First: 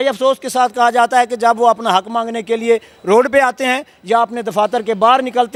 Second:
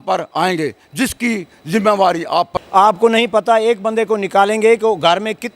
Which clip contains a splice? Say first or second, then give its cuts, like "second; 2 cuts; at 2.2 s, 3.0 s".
second; 1 cut; at 2.6 s